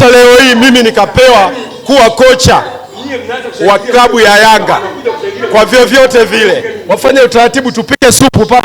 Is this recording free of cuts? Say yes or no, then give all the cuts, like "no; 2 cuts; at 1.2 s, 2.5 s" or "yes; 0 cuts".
no; 1 cut; at 6.7 s